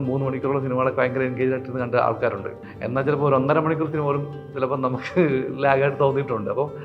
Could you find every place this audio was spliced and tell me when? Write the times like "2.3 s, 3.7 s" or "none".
2.6 s